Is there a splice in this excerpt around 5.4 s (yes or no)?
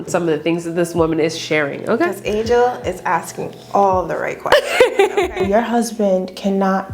yes